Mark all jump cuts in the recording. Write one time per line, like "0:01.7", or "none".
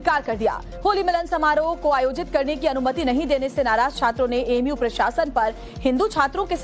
0:04.7